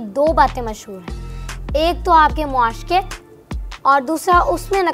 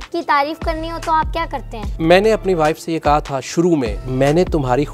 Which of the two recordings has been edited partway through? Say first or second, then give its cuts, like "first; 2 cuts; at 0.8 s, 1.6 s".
second; 2 cuts; at 1.8 s, 4.0 s